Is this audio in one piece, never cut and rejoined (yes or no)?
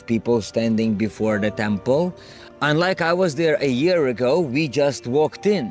yes